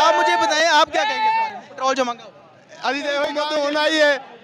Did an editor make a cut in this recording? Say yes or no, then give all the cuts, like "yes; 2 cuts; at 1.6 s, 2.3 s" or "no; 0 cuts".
yes; 1 cut; at 3.3 s